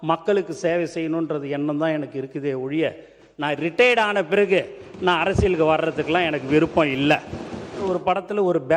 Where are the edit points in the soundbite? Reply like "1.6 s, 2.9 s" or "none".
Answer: 7.9 s